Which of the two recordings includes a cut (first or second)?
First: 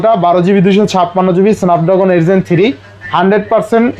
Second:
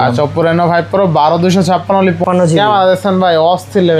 second